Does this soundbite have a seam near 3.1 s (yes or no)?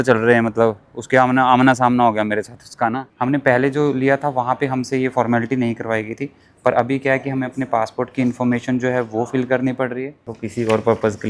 yes